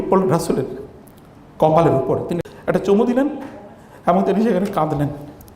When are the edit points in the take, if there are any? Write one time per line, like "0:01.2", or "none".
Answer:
0:02.4

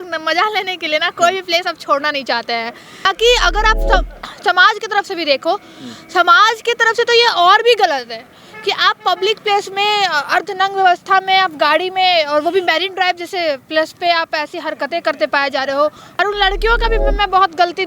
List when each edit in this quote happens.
0:03.1
0:16.1

